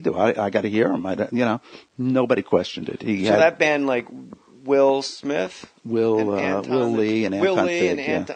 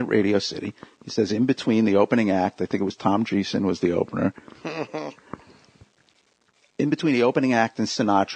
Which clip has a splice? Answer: first; 1 cut; at 3.0 s

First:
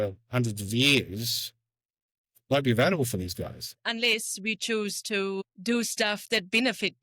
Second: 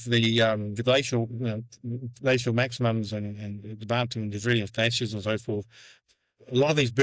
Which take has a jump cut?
second; 1 cut; at 6.0 s

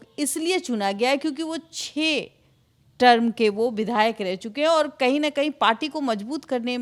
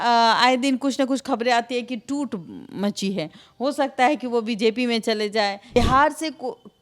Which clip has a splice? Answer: second; 1 cut; at 5.8 s

